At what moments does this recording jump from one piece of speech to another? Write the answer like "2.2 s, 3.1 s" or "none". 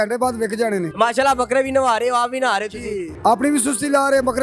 0.9 s, 3.1 s